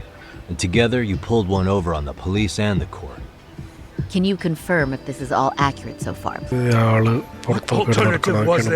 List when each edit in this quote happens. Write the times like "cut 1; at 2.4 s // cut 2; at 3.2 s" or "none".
cut 1; at 6.5 s